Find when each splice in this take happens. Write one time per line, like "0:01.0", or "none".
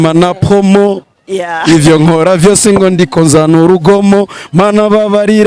none